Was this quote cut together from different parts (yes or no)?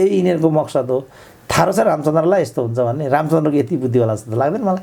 no